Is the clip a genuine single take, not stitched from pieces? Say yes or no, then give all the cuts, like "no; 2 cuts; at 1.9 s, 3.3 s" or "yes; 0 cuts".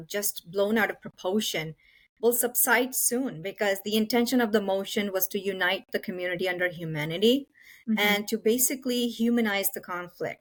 yes; 0 cuts